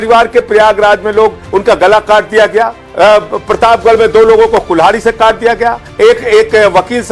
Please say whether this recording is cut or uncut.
cut